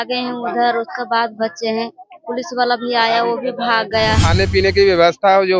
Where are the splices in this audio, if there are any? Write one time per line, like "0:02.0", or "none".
0:04.2